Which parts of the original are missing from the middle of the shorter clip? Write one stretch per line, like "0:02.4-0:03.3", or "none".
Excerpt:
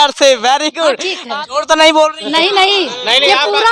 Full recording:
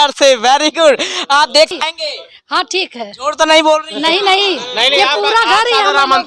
0:01.0-0:02.7